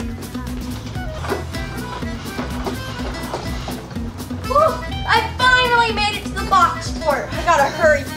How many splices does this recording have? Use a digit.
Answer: 1